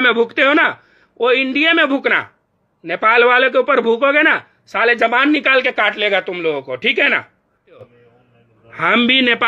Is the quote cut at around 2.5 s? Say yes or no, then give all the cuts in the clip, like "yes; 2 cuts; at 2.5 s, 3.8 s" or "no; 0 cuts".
no; 1 cut; at 7.8 s